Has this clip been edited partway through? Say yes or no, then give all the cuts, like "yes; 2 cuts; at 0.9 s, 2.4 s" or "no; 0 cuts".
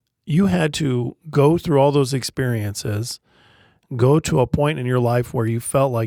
no; 0 cuts